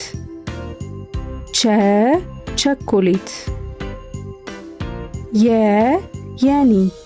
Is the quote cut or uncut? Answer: cut